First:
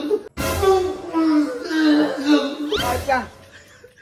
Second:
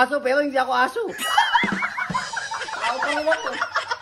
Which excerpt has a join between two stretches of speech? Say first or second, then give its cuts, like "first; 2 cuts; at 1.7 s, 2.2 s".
first; 1 cut; at 2.8 s